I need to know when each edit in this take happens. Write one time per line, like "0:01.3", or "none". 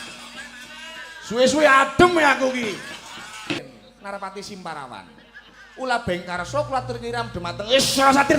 0:03.6